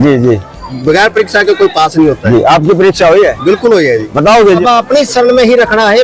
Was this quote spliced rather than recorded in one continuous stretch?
yes; 1 cut; at 4.6 s

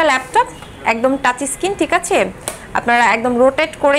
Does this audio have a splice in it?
no; 0 cuts

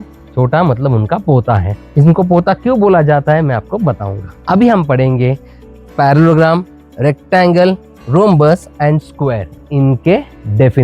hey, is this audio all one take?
yes; 0 cuts

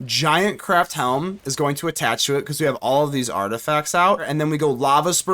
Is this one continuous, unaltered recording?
no; 1 cut; at 4.3 s

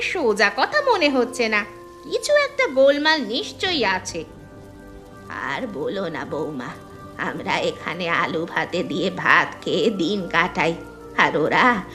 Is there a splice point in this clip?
no; 0 cuts

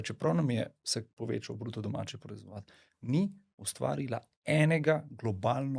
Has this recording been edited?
no; 0 cuts

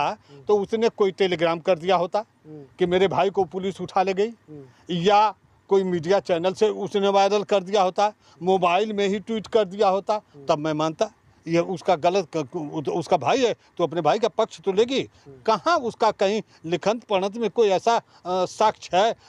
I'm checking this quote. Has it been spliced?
no; 0 cuts

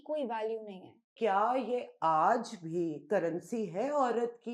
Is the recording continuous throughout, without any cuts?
no; 1 cut; at 1.1 s

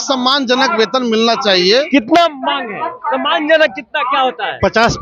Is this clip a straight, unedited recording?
yes; 0 cuts

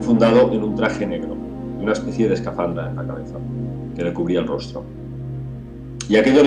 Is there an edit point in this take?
no; 0 cuts

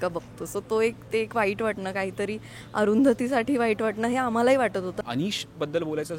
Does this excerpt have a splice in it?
yes; 1 cut; at 5.0 s

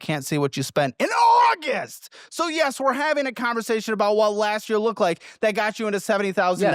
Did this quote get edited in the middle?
no; 0 cuts

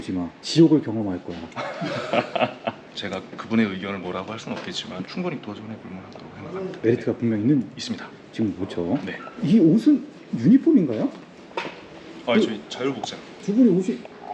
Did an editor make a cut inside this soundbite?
no; 0 cuts

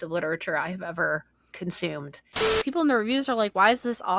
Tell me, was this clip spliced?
yes; 1 cut; at 2.5 s

